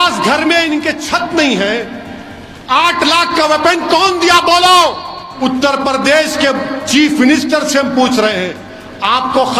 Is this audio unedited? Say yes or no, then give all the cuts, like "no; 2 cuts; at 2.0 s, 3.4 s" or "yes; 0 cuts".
no; 1 cut; at 5.3 s